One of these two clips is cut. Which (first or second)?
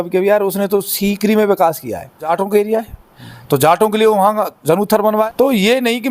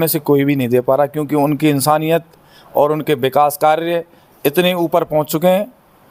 first